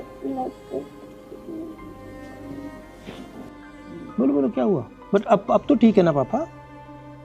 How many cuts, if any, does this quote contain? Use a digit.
0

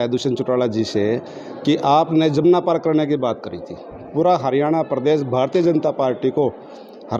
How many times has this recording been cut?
0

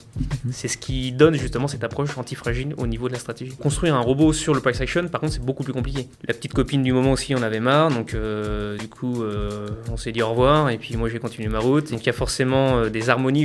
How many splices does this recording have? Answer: 3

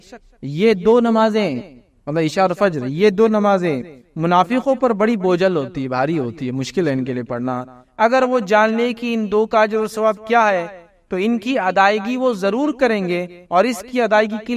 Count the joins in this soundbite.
0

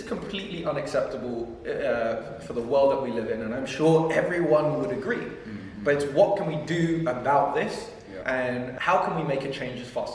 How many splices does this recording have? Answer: 1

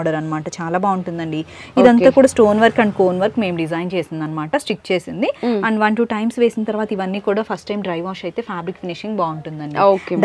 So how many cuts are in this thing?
0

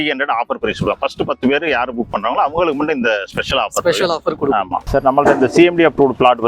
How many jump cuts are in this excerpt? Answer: 1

